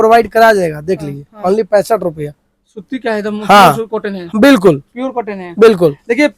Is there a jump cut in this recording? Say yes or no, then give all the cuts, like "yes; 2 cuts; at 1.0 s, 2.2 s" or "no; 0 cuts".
no; 0 cuts